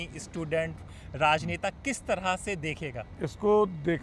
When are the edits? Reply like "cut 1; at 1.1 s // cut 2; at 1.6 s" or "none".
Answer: cut 1; at 3.1 s